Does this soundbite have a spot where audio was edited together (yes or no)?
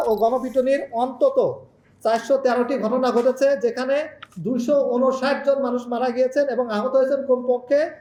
no